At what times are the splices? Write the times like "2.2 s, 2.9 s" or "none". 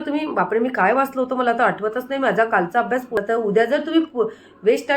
3.1 s